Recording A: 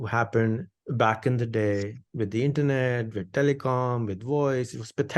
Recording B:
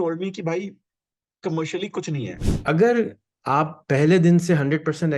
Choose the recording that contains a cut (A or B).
B